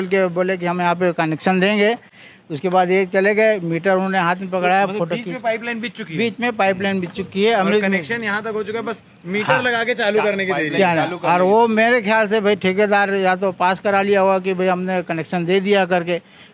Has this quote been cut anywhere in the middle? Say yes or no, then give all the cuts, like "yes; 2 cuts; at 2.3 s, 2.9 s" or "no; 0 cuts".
no; 0 cuts